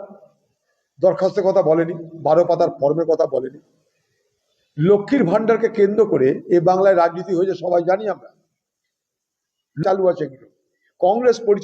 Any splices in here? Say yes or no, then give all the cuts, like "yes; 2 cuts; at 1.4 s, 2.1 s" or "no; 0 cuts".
yes; 1 cut; at 9.8 s